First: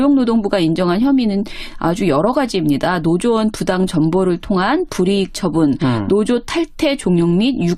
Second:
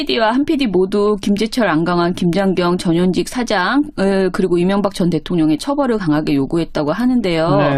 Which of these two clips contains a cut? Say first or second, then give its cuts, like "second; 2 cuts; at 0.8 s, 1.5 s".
second; 1 cut; at 2.8 s